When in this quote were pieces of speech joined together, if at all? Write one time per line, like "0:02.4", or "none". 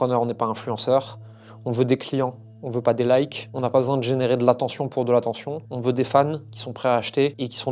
none

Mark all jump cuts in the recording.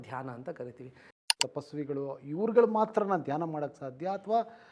0:01.3

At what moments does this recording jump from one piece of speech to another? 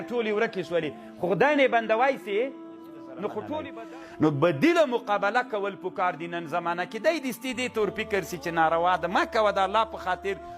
0:03.8

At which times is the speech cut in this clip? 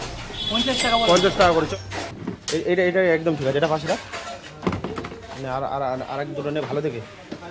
0:01.7

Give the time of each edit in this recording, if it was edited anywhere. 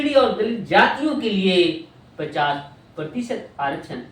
none

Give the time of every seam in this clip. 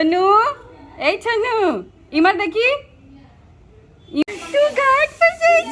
0:04.2

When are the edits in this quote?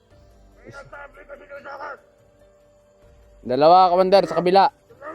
0:02.1
0:03.4

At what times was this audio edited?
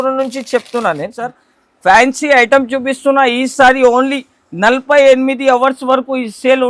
0:01.5

